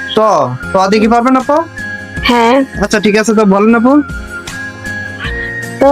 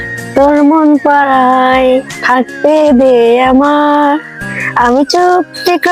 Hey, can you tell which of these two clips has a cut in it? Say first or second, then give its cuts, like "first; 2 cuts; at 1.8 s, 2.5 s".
first; 1 cut; at 2.2 s